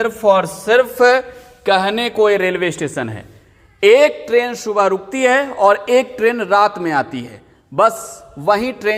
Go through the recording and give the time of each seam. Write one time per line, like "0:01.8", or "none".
none